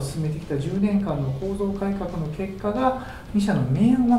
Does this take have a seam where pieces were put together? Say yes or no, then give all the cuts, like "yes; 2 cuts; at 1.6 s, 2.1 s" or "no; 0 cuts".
no; 0 cuts